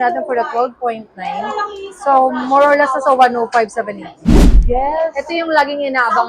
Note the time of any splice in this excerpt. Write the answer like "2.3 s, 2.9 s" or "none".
4.4 s